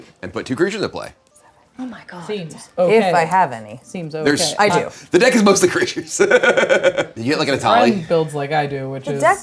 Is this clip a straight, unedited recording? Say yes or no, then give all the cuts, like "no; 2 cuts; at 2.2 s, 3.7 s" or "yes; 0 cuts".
yes; 0 cuts